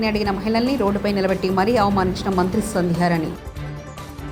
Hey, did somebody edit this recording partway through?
no; 0 cuts

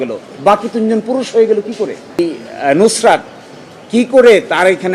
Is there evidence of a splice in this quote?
yes; 1 cut; at 2.2 s

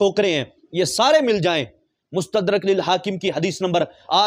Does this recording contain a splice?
no; 0 cuts

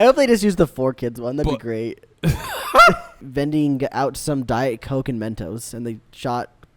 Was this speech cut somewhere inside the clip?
yes; 1 cut; at 3.2 s

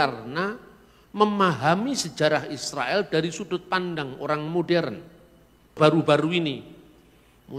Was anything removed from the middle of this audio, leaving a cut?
yes; 1 cut; at 5.8 s

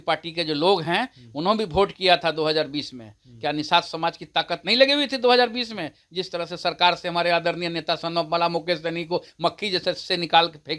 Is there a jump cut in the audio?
no; 0 cuts

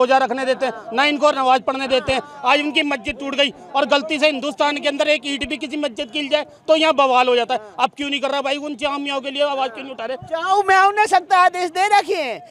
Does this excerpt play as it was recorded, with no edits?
yes; 0 cuts

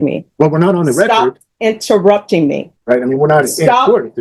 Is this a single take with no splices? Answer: no; 1 cut; at 2.7 s

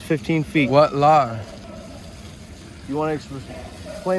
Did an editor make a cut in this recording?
no; 0 cuts

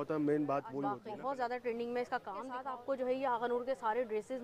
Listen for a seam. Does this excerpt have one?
yes; 2 cuts; at 1.0 s, 2.6 s

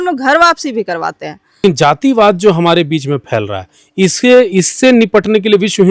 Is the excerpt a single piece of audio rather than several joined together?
no; 1 cut; at 1.6 s

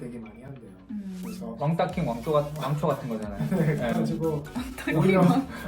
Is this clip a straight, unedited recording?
yes; 0 cuts

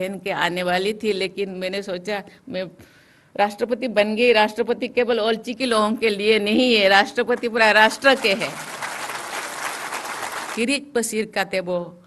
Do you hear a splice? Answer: yes; 1 cut; at 10.4 s

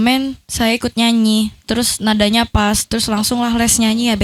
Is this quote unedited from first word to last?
yes; 0 cuts

